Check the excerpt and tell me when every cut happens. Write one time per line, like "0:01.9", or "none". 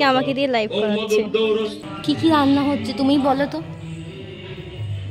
0:01.7

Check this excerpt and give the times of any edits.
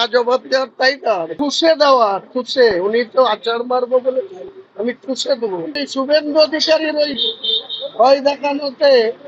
0:01.3
0:05.8

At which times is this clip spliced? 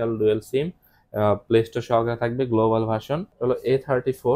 0:03.2

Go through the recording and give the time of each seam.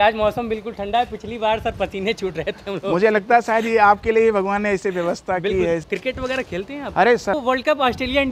0:05.8
0:07.4

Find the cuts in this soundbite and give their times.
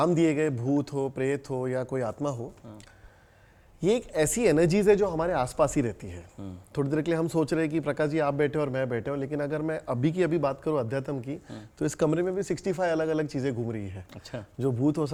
none

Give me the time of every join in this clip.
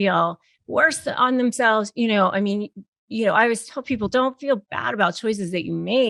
none

